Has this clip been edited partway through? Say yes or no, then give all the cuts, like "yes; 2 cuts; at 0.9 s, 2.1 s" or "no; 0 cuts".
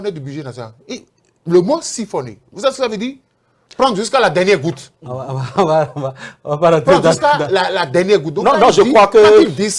no; 0 cuts